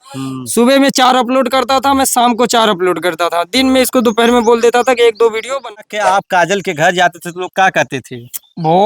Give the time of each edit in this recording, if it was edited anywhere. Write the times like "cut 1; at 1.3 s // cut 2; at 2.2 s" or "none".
cut 1; at 5.6 s